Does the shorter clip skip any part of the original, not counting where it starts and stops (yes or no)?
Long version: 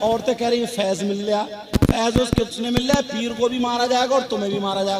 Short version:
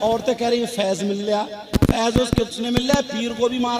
no